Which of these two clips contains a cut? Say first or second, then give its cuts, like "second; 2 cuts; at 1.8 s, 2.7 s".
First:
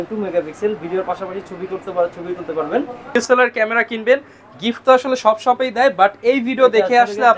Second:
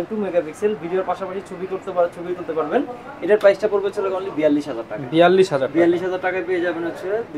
first; 1 cut; at 3.1 s